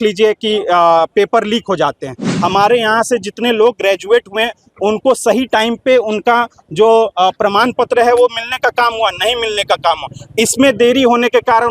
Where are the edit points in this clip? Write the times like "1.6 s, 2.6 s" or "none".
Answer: 2.2 s